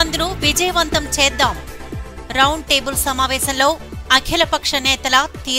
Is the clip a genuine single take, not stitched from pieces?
yes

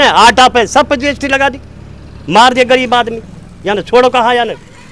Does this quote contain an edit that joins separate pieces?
no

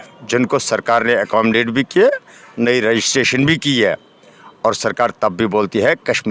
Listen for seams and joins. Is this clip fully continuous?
yes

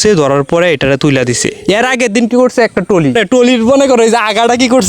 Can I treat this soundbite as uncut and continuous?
no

